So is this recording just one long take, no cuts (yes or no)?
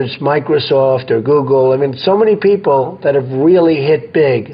yes